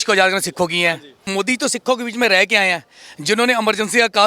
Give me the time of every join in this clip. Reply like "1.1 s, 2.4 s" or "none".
1.3 s